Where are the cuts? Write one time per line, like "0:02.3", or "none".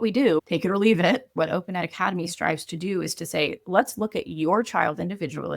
0:01.3